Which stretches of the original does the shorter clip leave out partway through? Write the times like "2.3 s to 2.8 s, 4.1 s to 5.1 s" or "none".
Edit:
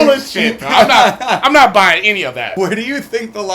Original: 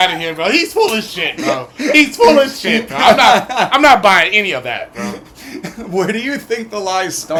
4.8 s to 5.9 s